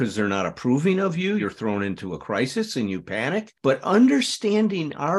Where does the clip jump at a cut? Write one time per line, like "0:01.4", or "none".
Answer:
0:01.4